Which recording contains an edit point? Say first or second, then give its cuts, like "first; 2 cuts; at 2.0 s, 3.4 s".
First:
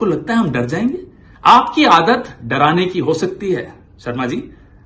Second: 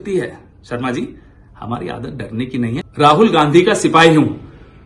second; 1 cut; at 2.8 s